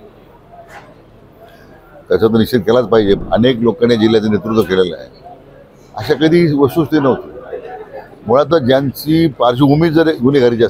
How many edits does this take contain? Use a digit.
1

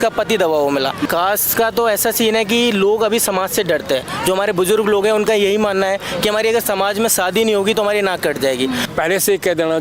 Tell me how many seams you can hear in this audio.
2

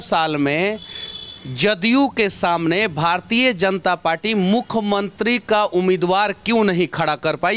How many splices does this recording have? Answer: 0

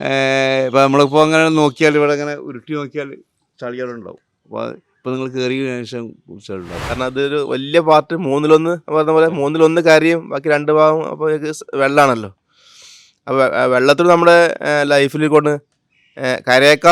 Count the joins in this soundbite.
1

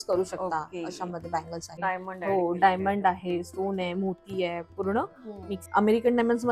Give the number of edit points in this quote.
2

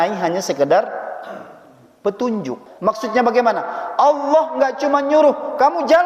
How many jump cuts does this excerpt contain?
1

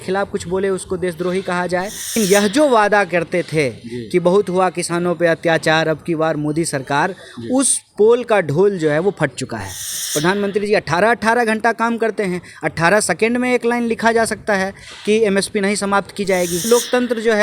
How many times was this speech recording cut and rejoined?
3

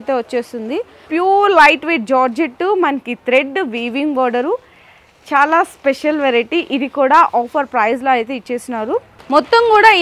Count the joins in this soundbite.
2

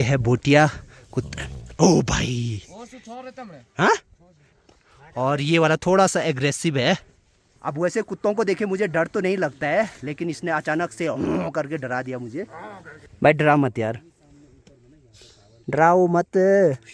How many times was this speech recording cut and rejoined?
0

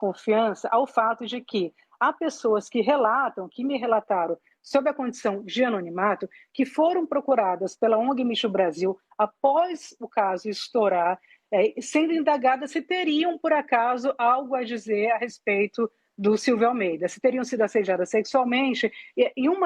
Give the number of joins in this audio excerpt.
0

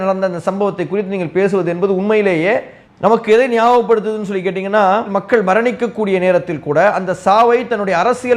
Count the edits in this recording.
1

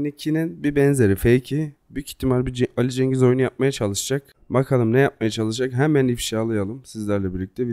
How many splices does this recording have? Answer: 1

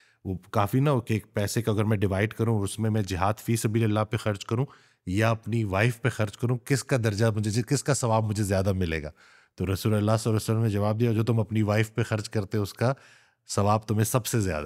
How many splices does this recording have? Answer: 0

